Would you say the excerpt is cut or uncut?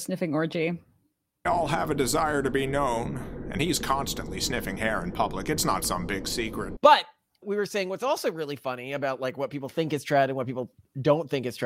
cut